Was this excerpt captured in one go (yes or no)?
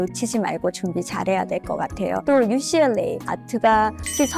no